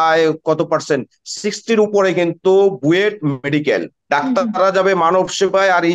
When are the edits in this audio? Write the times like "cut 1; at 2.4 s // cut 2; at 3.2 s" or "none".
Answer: cut 1; at 3.9 s